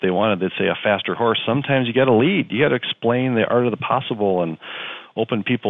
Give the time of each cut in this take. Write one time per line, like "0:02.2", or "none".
none